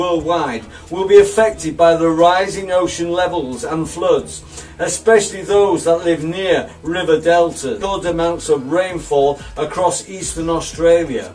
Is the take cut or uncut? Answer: uncut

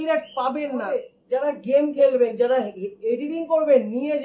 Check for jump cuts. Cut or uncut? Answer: cut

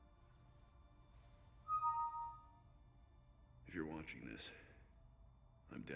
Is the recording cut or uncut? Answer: cut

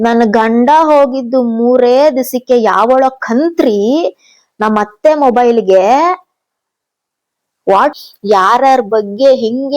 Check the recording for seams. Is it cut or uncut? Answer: cut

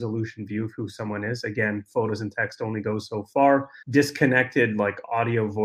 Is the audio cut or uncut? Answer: cut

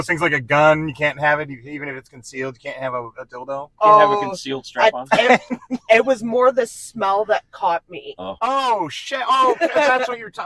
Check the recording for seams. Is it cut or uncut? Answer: uncut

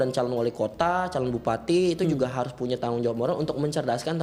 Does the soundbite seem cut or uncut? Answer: uncut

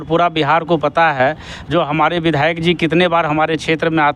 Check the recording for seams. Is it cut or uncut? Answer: uncut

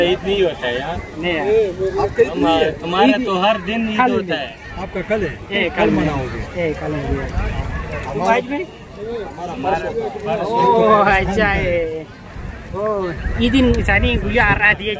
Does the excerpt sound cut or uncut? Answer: uncut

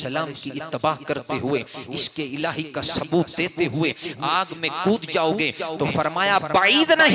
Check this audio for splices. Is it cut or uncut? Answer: uncut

